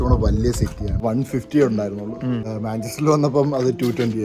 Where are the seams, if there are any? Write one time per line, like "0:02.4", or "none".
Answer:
0:01.0
0:02.5

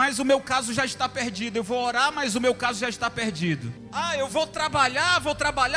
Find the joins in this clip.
0:03.8

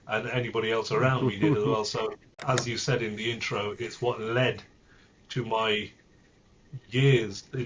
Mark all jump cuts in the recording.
0:02.3

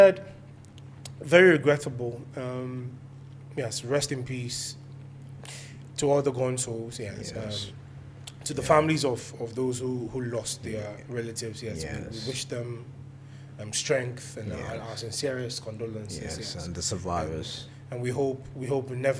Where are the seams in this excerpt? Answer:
none

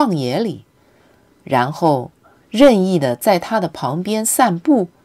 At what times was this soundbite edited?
none

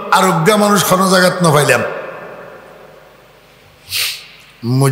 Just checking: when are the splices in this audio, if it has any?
none

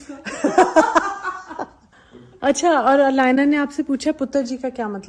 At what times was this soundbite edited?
0:02.0

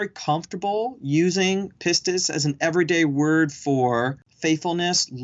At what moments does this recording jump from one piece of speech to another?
0:04.2

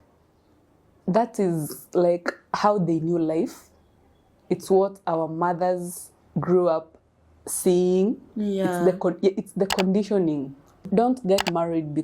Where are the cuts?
0:10.8

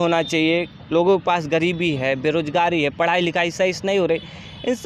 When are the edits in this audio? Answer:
none

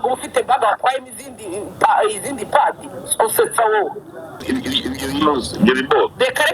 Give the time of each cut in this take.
0:04.4

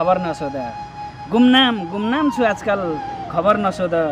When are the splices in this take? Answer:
none

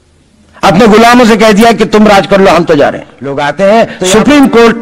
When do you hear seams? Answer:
0:03.4

